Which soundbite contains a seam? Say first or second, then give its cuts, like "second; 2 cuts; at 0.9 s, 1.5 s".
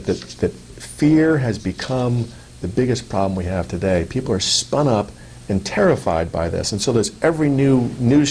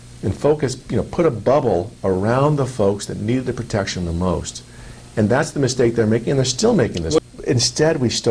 second; 1 cut; at 7.2 s